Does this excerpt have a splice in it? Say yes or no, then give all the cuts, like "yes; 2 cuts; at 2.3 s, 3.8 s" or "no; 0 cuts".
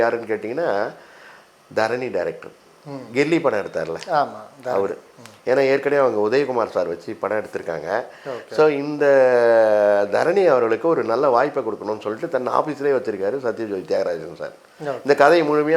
no; 0 cuts